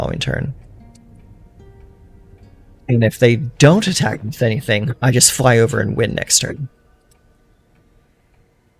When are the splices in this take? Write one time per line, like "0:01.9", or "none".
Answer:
none